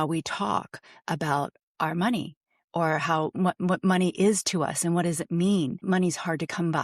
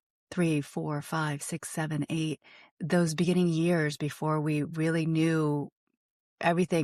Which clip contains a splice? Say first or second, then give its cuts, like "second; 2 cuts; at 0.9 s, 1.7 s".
first; 1 cut; at 5.8 s